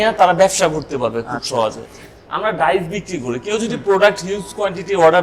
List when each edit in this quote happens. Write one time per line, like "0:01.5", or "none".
none